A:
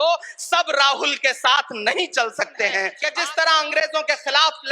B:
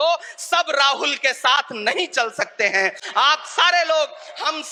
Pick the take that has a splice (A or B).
A